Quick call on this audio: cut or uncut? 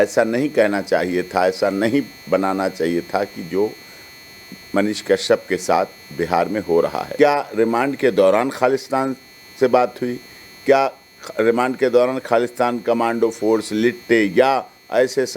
cut